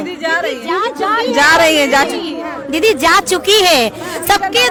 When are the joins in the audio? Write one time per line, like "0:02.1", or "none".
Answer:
none